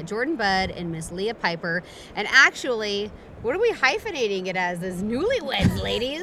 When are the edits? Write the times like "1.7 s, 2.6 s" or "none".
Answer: none